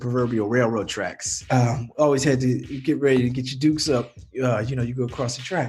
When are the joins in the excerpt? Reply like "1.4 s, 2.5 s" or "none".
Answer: none